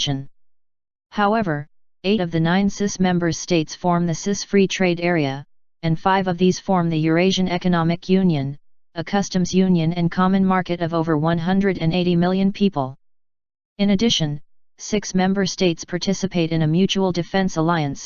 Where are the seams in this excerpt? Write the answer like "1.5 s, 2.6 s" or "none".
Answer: 7.0 s